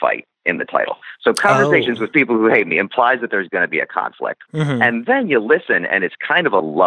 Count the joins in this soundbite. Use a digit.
2